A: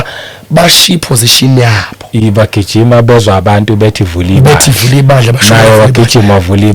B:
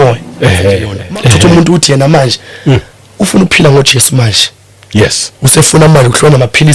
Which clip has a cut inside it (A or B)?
B